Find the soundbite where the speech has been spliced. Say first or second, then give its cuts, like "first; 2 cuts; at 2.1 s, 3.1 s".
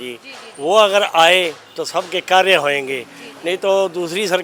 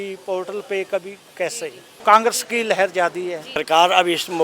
second; 2 cuts; at 1.9 s, 3.6 s